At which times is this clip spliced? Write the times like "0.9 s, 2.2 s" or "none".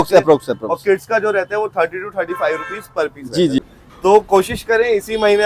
3.6 s